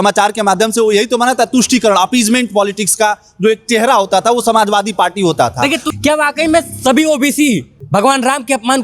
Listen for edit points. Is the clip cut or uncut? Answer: cut